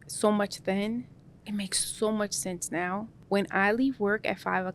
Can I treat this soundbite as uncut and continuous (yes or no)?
no